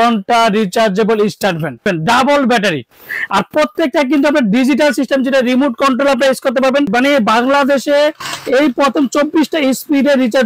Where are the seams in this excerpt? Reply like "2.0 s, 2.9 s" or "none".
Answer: 1.8 s, 6.9 s